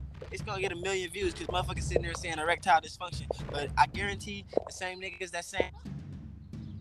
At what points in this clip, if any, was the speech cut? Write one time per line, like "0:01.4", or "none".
0:05.8

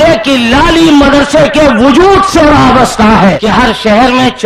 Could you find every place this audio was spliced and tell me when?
0:03.4

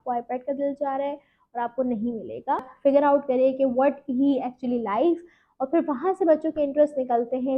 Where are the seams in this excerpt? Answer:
0:02.7

